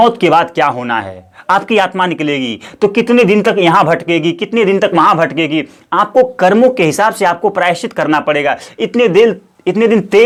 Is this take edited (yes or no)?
no